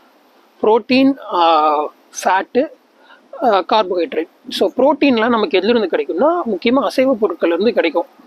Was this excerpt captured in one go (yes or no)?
yes